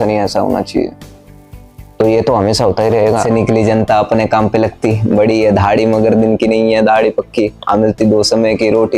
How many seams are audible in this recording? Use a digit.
1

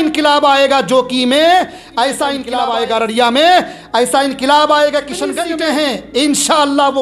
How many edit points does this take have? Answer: 2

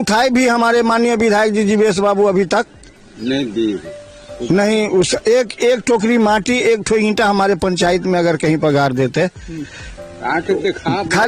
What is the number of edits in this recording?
0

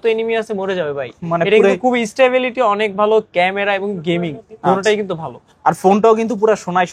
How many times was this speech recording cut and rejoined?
0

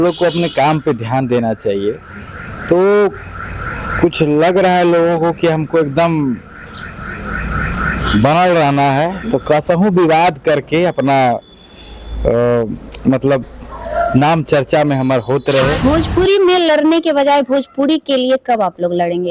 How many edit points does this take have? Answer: 1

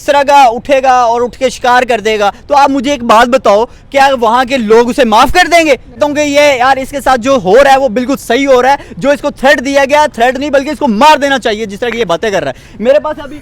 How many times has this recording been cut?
1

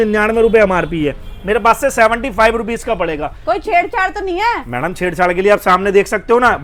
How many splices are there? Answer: 0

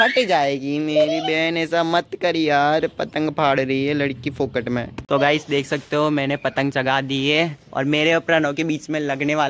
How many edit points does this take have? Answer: 1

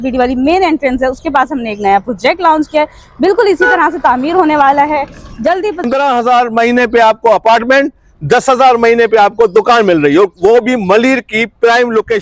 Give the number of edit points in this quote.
1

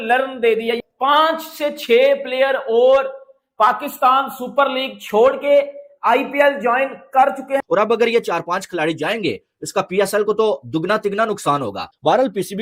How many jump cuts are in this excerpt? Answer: 2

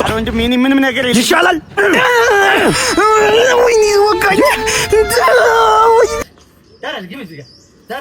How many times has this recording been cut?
1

